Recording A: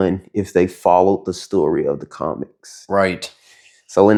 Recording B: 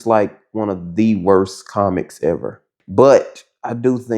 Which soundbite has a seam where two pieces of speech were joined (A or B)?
B